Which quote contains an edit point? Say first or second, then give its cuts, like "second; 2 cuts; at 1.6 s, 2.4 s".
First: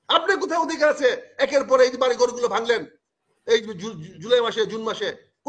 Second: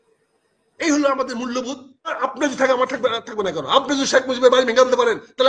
second; 1 cut; at 2.2 s